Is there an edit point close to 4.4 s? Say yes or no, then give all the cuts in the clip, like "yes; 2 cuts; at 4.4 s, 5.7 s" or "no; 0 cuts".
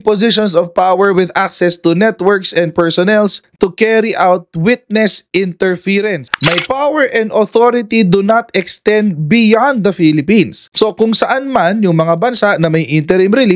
no; 1 cut; at 6.3 s